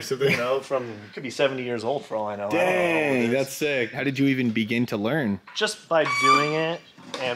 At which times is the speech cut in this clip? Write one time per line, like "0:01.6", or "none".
0:04.0